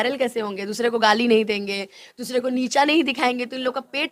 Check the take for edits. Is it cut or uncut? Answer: uncut